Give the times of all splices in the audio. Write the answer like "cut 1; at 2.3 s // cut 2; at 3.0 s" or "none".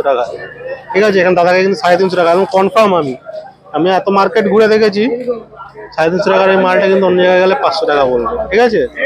none